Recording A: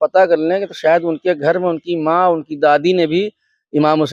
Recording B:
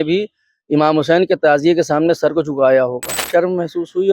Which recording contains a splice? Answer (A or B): B